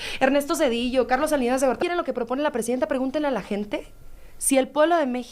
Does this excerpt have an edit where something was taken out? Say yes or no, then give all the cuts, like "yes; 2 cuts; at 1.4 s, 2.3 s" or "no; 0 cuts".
yes; 1 cut; at 1.8 s